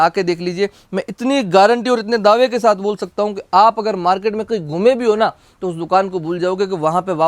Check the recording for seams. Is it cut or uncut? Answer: uncut